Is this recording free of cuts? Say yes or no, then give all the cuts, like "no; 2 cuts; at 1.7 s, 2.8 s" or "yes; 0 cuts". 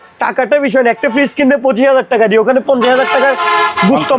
yes; 0 cuts